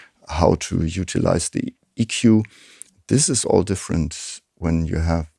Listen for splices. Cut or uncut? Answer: uncut